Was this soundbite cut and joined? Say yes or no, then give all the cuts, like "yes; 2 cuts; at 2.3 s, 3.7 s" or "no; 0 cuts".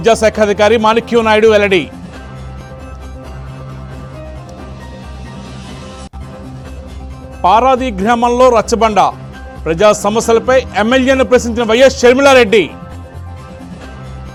no; 0 cuts